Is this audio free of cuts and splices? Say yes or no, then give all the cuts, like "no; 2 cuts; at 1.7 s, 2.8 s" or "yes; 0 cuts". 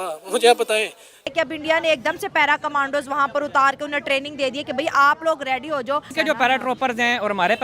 no; 2 cuts; at 1.3 s, 6.1 s